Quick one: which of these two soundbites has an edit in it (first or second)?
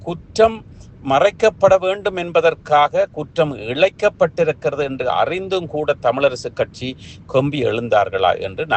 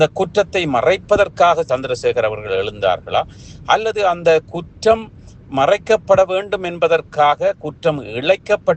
second